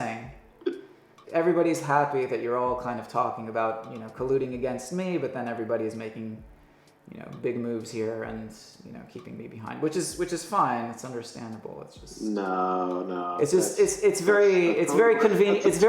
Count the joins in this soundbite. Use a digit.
1